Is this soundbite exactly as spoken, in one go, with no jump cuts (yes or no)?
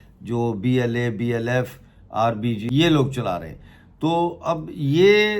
no